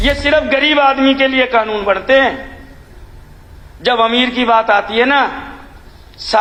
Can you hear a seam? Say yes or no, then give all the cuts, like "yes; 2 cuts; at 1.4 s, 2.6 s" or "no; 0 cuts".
no; 0 cuts